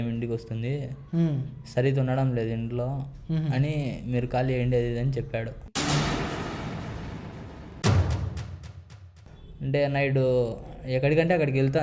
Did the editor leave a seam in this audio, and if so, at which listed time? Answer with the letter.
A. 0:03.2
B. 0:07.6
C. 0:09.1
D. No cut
C